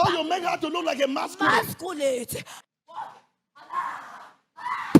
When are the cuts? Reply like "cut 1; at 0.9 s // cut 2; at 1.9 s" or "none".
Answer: cut 1; at 2.6 s